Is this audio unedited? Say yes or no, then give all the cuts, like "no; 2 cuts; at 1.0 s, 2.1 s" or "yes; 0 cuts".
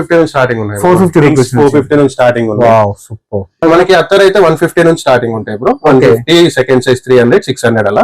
no; 1 cut; at 3.6 s